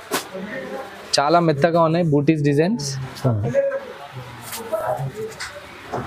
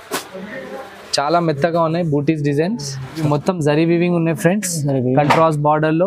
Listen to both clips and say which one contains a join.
second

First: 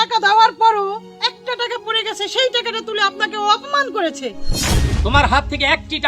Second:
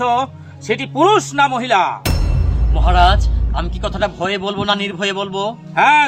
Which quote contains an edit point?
first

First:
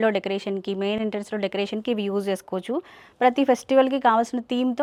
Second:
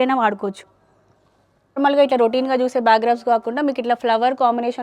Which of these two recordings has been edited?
second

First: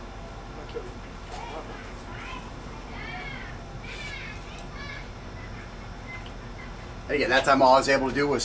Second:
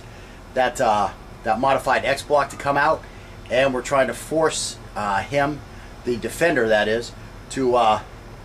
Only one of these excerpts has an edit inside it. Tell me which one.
second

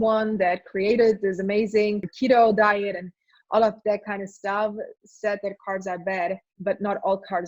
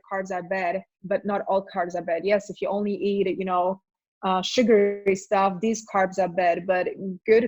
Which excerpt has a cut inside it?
first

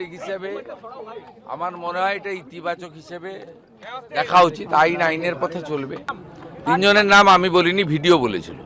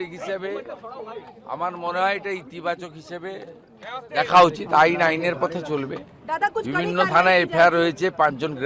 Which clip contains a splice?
first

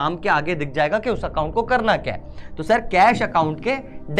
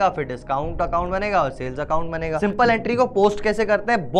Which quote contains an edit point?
second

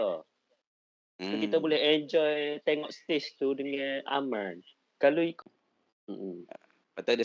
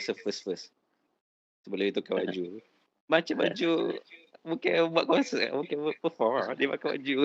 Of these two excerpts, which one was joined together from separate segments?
first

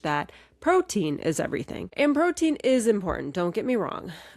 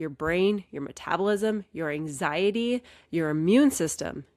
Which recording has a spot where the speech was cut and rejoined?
first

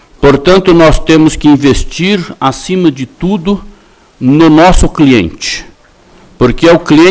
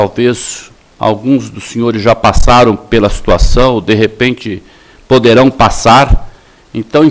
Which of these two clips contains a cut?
first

